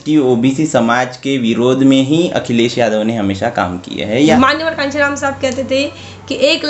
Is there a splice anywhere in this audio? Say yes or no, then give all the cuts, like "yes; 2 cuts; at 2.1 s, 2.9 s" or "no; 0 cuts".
yes; 1 cut; at 4.3 s